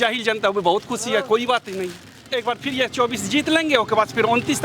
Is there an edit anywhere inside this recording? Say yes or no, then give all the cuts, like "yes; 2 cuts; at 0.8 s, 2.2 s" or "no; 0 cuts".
yes; 1 cut; at 2.3 s